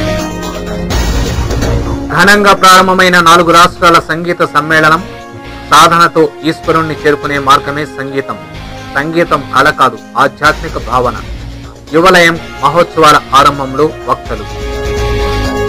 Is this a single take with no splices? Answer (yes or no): no